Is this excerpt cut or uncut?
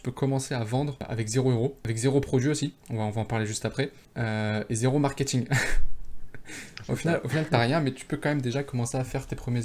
cut